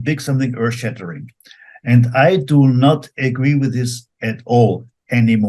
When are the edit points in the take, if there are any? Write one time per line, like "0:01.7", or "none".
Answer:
none

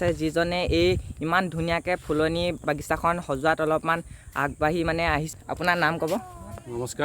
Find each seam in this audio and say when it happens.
0:05.3

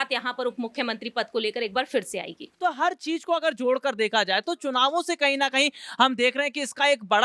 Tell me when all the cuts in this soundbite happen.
0:02.5

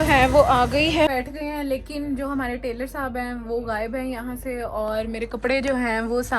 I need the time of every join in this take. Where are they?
0:01.1

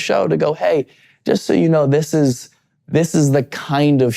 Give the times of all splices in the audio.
none

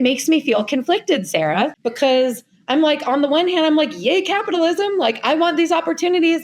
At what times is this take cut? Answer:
0:01.7

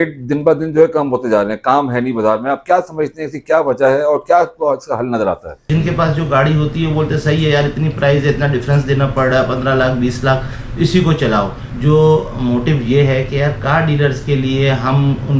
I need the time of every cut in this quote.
0:05.6
0:11.6

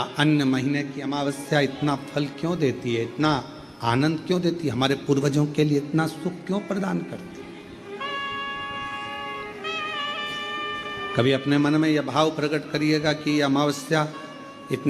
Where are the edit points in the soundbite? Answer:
0:07.2

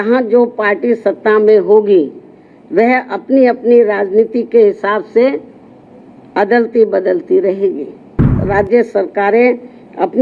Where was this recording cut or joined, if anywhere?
0:08.4

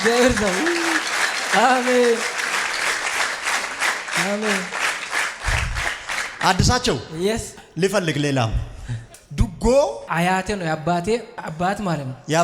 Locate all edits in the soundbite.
none

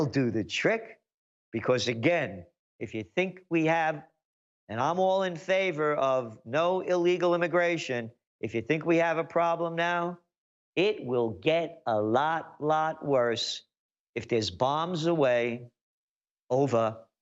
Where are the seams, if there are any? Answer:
none

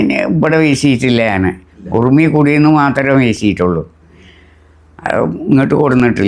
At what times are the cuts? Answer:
none

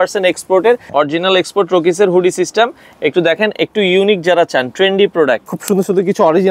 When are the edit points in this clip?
0:00.9
0:05.4

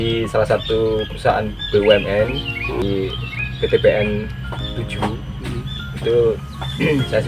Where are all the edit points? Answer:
0:02.8

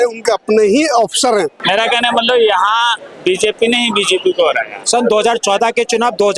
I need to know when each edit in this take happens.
0:01.6
0:04.8

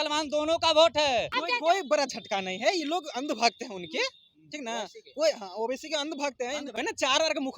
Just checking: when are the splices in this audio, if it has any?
0:01.4
0:06.8

